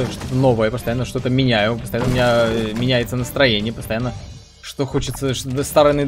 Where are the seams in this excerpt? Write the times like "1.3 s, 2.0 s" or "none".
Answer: none